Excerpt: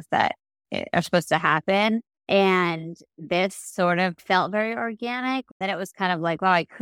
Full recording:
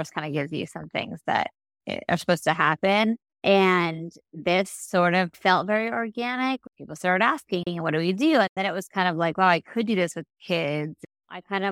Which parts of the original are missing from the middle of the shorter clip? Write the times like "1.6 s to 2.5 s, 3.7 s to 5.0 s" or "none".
6.7 s to 8.5 s